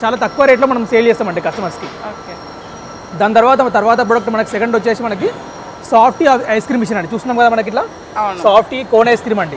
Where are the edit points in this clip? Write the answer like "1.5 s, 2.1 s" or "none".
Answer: none